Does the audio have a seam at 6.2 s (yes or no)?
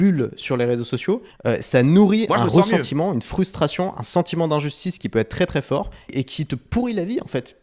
yes